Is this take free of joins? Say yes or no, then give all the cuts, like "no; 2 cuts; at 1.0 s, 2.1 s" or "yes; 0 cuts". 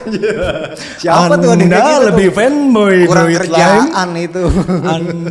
yes; 0 cuts